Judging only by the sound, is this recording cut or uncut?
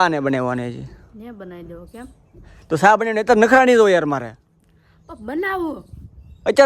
uncut